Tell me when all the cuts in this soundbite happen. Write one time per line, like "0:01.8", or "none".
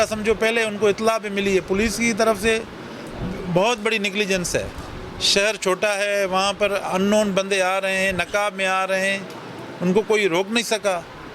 none